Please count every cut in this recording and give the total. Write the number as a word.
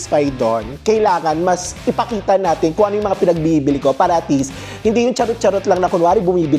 zero